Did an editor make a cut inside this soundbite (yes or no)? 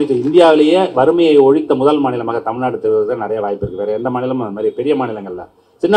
no